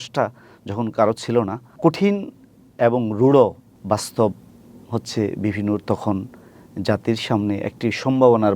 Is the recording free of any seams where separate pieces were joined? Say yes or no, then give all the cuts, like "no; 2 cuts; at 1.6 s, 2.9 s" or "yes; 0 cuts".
no; 2 cuts; at 1.6 s, 3.7 s